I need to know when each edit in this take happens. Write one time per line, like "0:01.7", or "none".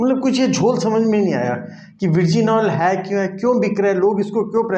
none